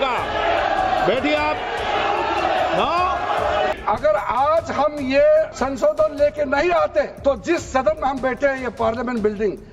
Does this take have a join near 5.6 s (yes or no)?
yes